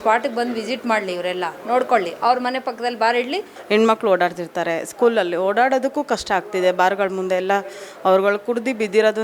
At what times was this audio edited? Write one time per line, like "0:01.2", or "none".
0:03.5